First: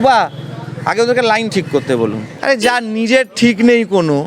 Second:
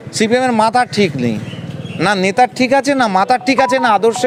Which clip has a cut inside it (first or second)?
first